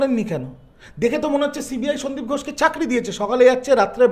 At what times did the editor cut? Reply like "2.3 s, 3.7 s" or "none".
none